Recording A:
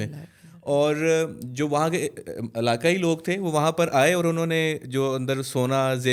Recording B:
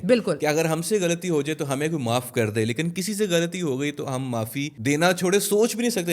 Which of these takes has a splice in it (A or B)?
B